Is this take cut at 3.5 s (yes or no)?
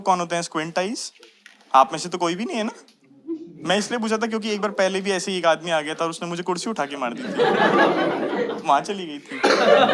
yes